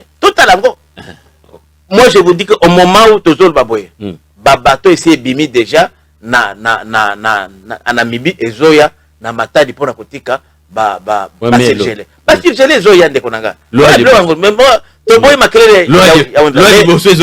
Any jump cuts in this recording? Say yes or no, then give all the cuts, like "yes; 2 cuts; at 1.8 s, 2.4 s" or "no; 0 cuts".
no; 0 cuts